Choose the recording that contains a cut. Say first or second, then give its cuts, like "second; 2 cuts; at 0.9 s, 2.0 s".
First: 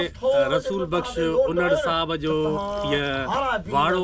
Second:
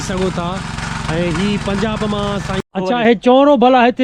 second; 1 cut; at 2.6 s